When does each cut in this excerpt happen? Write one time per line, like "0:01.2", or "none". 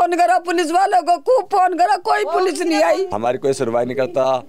0:03.1